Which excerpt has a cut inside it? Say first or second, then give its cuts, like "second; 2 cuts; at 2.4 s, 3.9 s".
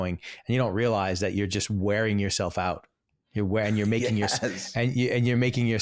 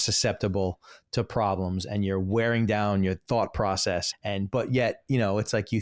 second; 1 cut; at 4.1 s